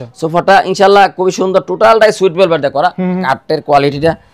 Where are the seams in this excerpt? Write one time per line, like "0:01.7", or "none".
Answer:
0:03.2